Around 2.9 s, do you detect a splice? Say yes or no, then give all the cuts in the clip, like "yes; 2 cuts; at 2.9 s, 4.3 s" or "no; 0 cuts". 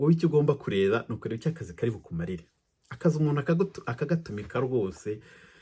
no; 0 cuts